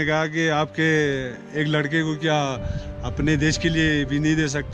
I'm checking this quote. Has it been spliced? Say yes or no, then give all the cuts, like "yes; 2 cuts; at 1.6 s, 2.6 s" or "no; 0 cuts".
no; 0 cuts